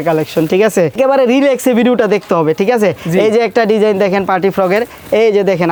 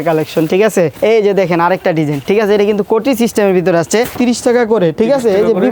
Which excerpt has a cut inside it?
second; 3 cuts; at 0.9 s, 2.2 s, 4.2 s

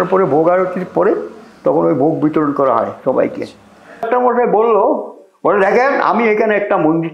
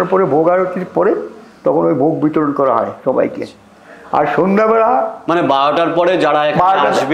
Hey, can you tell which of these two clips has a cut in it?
first; 1 cut; at 4.0 s

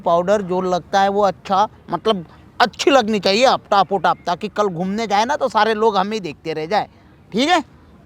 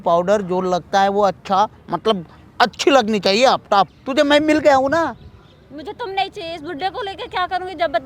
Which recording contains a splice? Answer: second; 1 cut; at 3.9 s

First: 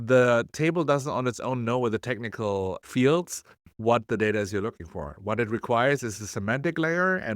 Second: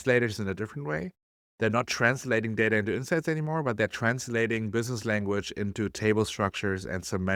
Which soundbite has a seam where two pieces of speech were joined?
first; 1 cut; at 2.8 s

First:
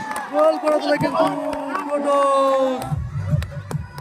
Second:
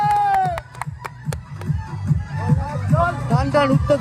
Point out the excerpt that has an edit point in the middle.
first; 1 cut; at 2.9 s

